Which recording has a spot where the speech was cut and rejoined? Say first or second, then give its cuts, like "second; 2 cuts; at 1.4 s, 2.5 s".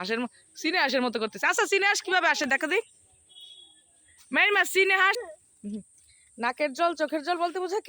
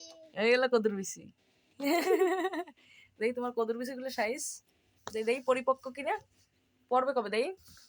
first; 1 cut; at 5.2 s